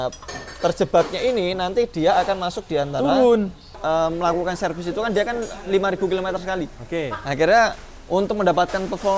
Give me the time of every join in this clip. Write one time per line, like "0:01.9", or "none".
0:03.6